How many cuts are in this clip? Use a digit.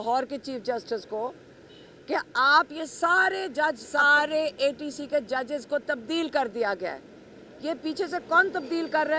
1